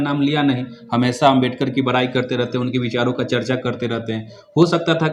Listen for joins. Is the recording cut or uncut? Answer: uncut